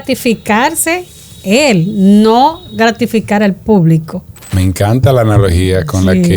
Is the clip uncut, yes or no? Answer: no